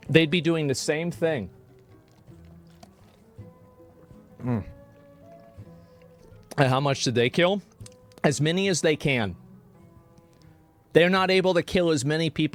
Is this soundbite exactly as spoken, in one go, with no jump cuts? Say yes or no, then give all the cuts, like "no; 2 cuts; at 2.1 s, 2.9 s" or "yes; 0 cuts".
yes; 0 cuts